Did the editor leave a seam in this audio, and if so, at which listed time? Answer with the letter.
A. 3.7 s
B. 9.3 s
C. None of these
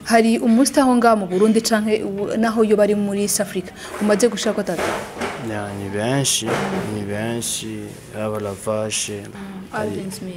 B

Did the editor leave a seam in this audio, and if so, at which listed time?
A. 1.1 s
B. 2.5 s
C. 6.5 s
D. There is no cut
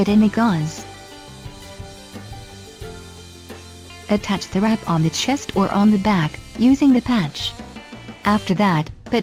D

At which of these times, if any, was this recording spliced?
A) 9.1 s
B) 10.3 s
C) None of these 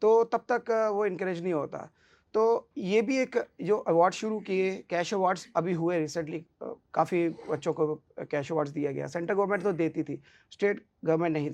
C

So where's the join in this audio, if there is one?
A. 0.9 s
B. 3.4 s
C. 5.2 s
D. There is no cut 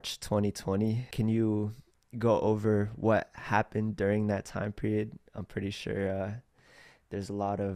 D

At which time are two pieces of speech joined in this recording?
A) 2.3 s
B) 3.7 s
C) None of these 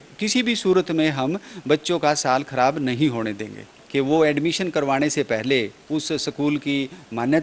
B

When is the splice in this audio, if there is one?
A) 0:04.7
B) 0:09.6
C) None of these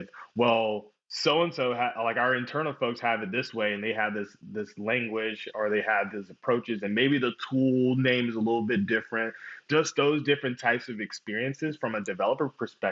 B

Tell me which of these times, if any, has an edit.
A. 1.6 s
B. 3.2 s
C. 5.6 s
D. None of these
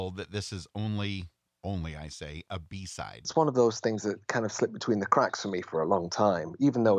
B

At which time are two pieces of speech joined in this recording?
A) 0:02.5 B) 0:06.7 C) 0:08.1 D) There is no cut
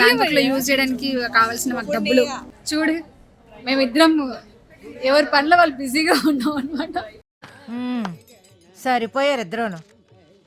A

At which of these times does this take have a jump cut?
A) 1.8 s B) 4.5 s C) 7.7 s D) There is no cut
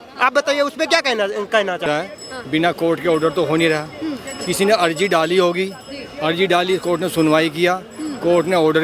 A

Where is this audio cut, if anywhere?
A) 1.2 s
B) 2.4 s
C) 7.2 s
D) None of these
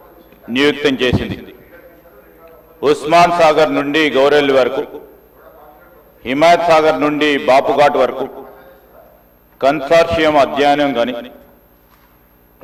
D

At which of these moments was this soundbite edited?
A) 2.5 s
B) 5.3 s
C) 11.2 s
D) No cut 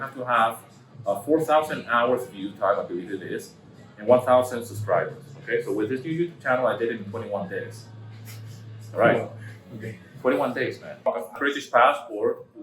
C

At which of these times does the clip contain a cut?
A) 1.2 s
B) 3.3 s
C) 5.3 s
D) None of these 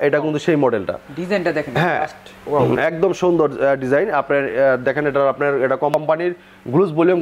D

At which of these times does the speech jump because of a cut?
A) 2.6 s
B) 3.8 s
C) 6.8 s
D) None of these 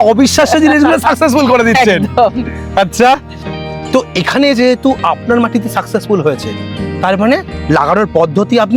D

